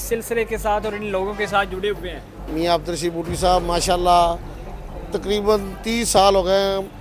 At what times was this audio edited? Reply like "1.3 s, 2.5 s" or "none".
2.3 s